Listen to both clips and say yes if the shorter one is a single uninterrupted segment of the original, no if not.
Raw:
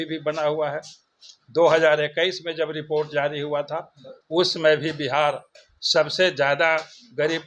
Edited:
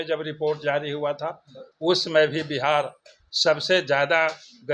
yes